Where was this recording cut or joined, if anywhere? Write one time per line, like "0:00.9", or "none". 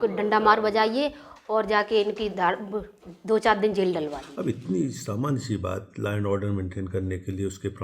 0:04.2

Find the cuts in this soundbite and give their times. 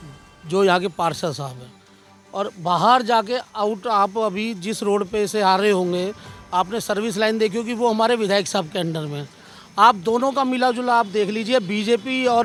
none

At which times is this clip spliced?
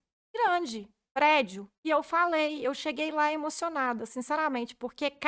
0:01.7

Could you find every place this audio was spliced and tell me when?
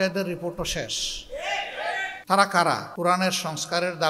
0:02.2
0:02.9

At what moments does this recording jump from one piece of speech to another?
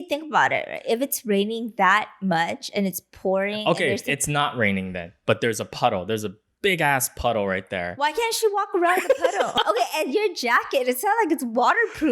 0:09.5

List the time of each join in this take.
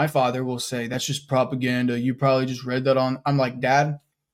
none

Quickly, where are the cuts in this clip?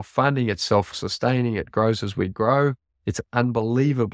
0:01.0

